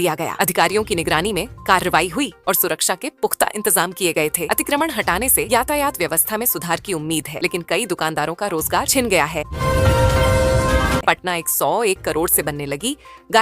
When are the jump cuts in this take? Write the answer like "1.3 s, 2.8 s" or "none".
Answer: 9.5 s, 11.0 s